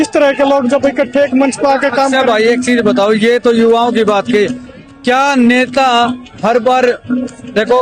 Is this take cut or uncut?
uncut